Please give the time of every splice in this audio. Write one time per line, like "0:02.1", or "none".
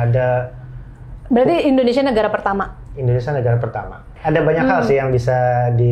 0:04.1

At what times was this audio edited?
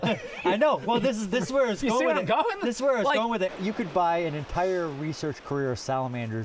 0:03.5

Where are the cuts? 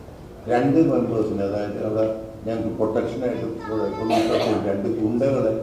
none

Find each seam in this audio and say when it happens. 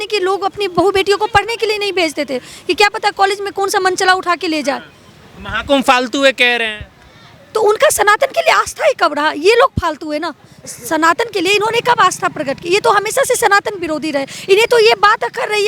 none

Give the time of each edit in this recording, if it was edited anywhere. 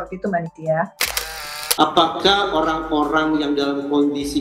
0:01.4

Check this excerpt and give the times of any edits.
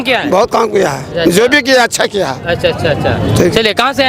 none

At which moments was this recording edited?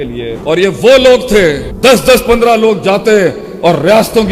none

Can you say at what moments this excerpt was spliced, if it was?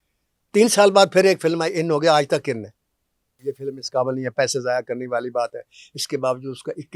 0:03.4

